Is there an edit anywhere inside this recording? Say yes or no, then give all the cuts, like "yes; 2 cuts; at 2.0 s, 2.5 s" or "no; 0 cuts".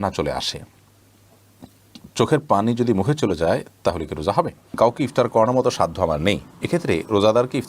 yes; 1 cut; at 4.7 s